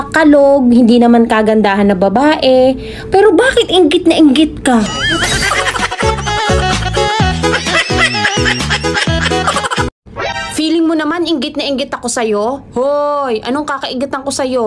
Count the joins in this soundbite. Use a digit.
1